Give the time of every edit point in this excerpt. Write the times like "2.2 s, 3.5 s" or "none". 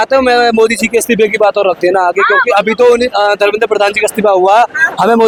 none